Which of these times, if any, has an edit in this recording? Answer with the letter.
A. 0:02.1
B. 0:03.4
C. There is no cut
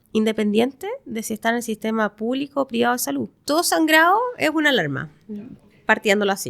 B